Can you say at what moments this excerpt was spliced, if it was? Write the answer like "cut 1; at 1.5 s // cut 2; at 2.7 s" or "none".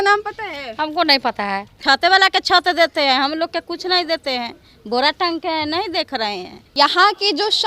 cut 1; at 1.7 s // cut 2; at 6.7 s